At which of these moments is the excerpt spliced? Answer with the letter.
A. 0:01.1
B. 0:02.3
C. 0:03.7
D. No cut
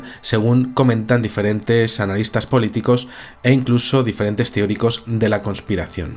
D